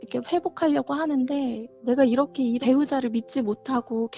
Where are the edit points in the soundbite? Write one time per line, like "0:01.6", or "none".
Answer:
0:01.8